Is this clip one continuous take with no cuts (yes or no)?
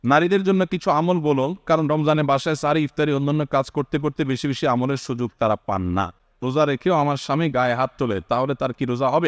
no